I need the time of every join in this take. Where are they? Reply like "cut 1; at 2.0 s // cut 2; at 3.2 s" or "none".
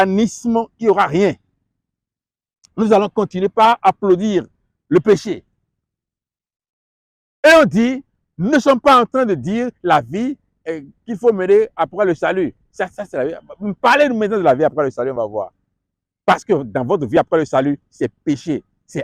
none